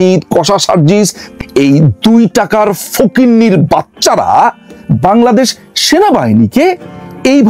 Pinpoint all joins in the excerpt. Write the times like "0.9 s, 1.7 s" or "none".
1.2 s